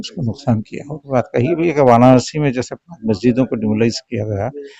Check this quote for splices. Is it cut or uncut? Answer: cut